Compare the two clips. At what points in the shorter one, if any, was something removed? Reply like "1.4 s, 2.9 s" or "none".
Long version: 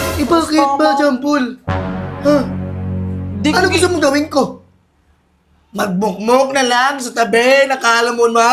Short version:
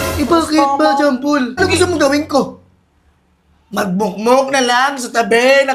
1.6 s